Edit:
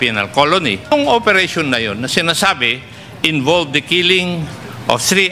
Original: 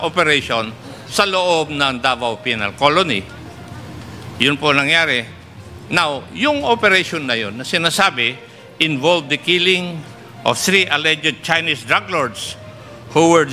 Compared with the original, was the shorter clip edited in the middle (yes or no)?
yes